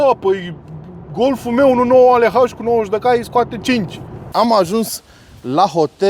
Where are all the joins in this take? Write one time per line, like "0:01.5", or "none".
0:04.2

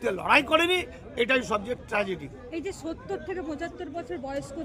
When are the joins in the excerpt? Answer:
none

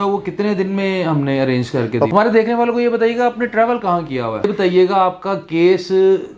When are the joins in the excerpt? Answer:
0:02.1
0:04.5

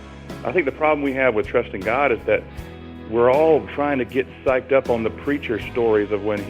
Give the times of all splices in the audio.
none

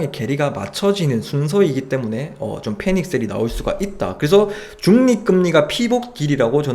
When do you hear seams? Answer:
none

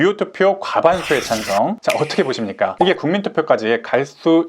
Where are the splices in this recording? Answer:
0:01.8

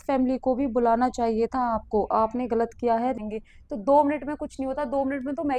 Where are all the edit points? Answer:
0:03.2

